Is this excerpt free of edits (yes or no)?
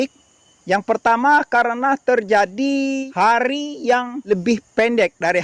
no